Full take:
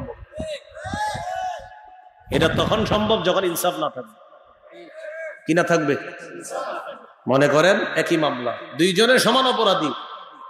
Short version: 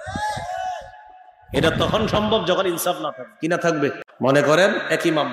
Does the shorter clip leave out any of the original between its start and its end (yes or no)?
yes